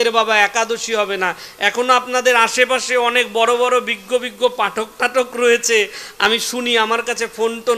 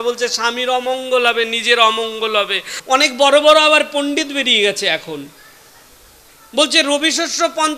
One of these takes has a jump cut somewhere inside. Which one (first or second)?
second